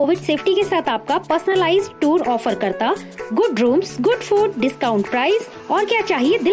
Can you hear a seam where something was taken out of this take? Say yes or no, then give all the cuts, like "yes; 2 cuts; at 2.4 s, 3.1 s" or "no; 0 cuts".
no; 0 cuts